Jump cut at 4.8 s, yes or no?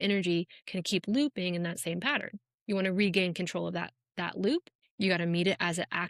yes